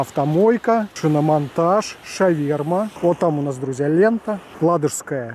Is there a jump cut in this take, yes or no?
yes